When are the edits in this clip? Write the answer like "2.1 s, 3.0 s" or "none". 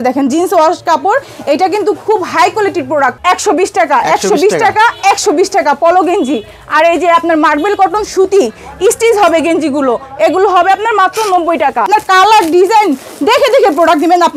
3.2 s, 11.9 s

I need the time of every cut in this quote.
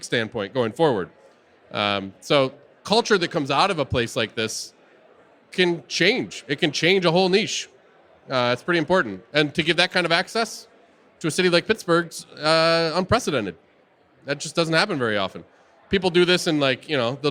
none

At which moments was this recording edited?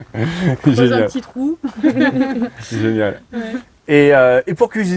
none

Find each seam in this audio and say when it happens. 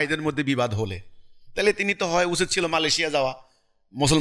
none

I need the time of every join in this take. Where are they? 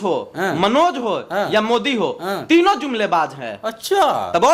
none

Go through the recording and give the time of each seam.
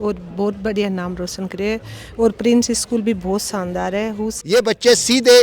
4.3 s

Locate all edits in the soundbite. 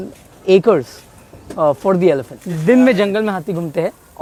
none

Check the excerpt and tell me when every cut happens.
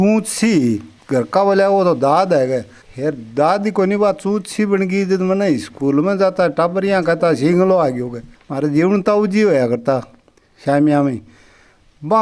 none

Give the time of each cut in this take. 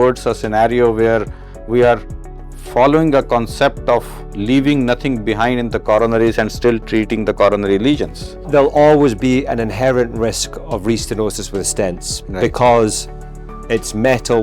8.5 s

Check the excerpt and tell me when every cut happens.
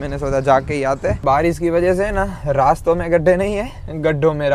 1.2 s

